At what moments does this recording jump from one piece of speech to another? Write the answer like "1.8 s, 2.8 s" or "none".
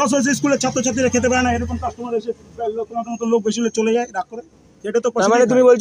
none